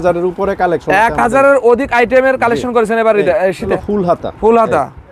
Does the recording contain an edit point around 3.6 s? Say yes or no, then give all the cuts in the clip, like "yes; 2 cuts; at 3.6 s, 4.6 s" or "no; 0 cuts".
yes; 1 cut; at 3.6 s